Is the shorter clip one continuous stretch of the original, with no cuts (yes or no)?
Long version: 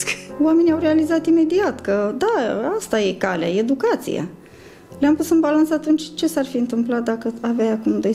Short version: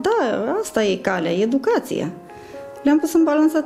yes